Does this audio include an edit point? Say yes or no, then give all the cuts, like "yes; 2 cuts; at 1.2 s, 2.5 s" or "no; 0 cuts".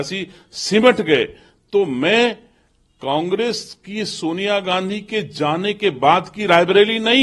no; 0 cuts